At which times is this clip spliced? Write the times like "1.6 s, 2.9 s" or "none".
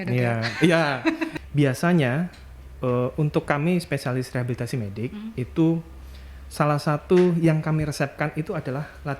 1.3 s